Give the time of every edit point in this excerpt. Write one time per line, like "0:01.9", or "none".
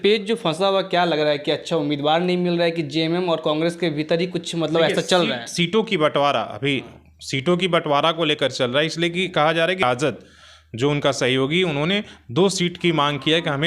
0:09.8